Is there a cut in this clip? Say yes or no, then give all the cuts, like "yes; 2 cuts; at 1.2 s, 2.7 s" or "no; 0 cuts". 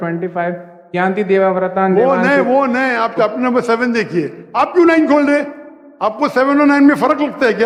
no; 0 cuts